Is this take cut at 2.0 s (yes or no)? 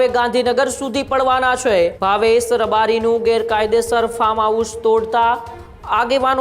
yes